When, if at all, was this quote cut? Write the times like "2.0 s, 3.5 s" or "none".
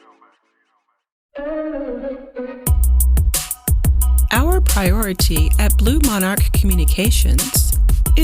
1.0 s